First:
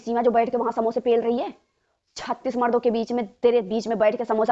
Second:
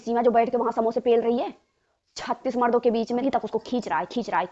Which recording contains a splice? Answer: second; 1 cut; at 3.2 s

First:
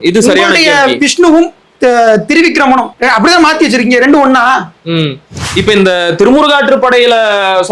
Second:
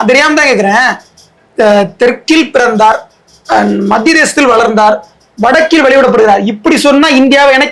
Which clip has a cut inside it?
first; 1 cut; at 5.4 s

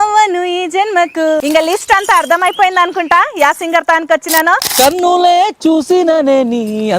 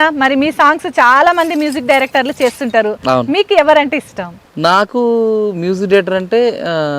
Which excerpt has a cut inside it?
first; 2 cuts; at 1.4 s, 4.7 s

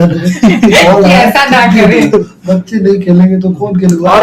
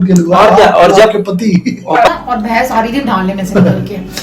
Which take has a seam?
second; 1 cut; at 2.1 s

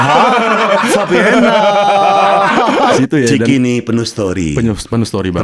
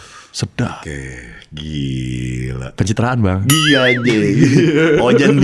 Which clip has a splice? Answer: first; 1 cut; at 3.0 s

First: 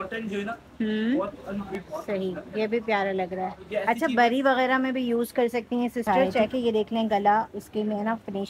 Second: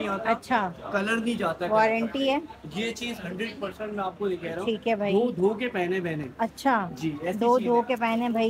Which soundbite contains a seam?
first; 2 cuts; at 1.7 s, 6.5 s

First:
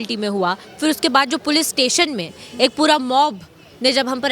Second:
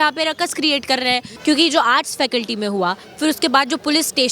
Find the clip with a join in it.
second; 1 cut; at 1.3 s

